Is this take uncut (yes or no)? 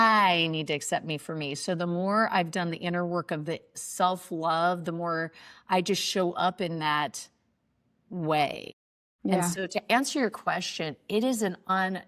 yes